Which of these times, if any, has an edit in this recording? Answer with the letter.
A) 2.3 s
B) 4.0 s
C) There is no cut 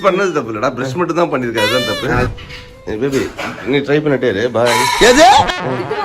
A